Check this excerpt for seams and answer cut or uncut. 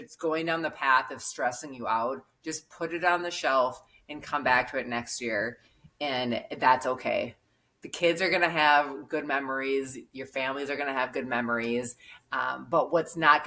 uncut